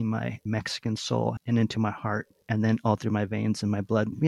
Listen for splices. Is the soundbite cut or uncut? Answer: cut